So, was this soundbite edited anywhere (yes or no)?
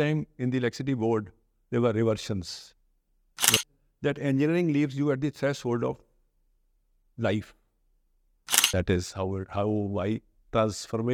yes